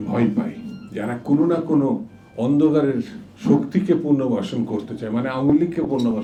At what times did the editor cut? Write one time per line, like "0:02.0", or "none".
none